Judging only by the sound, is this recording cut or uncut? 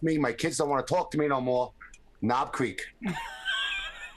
uncut